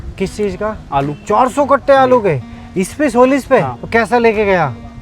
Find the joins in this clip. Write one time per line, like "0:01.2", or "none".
0:01.2
0:03.8